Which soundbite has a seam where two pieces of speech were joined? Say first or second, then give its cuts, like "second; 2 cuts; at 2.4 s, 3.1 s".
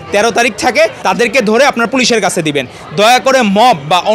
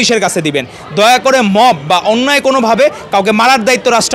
first; 1 cut; at 1.0 s